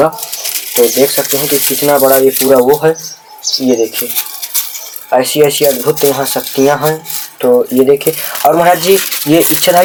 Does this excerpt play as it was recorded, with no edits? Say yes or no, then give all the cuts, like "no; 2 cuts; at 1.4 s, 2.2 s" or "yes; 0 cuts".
yes; 0 cuts